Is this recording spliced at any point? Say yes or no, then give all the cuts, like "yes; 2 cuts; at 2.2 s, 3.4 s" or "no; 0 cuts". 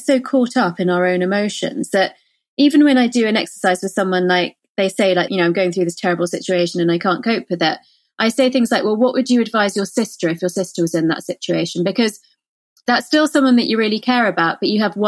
yes; 1 cut; at 5.3 s